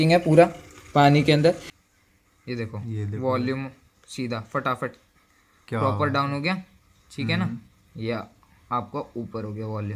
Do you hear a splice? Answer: yes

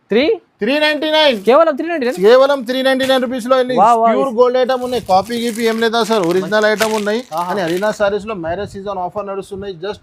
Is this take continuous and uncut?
yes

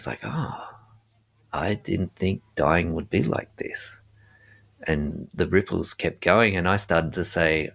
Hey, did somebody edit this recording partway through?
no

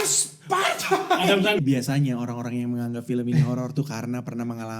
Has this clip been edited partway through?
yes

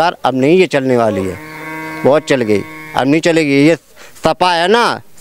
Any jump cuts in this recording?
no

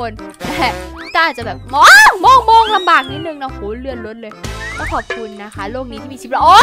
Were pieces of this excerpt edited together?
yes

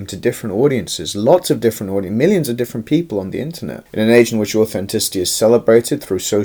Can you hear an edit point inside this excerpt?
no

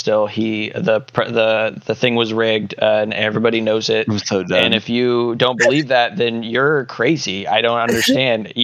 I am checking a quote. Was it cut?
no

